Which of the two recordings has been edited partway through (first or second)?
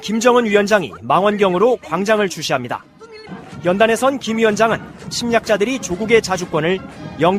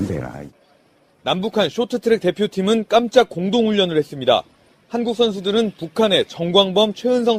first